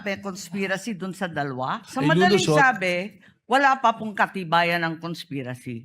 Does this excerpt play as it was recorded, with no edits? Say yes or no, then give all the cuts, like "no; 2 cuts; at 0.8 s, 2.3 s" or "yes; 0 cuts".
no; 1 cut; at 1.8 s